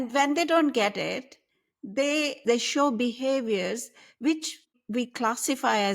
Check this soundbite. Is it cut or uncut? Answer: cut